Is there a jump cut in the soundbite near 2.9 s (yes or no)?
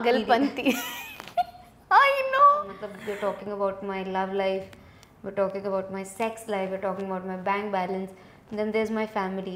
yes